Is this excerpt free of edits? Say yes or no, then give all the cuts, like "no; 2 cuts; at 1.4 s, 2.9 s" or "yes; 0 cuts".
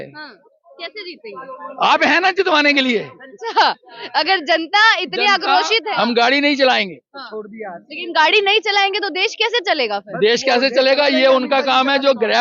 no; 1 cut; at 5.9 s